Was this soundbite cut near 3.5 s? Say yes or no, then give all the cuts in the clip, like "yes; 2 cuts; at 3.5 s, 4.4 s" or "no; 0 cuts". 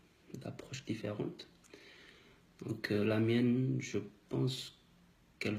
yes; 1 cut; at 3.5 s